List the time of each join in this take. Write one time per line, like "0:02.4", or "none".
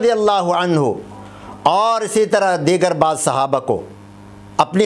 none